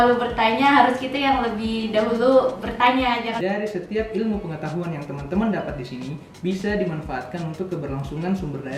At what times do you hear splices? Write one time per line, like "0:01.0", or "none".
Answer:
0:03.3